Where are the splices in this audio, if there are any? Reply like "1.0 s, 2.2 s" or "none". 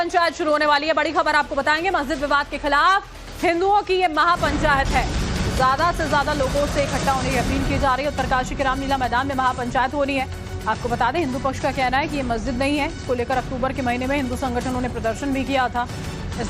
11.6 s